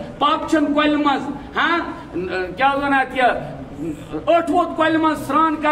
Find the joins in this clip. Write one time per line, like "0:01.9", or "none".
none